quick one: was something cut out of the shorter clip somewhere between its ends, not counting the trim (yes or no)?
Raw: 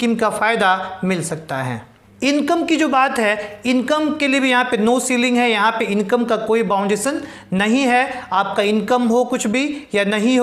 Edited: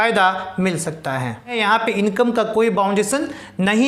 yes